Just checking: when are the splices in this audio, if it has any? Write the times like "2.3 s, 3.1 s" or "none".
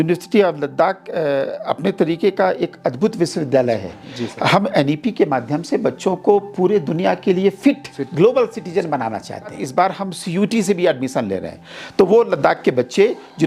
9.6 s